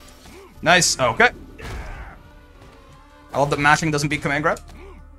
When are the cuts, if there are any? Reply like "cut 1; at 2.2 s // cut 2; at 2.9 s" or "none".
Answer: none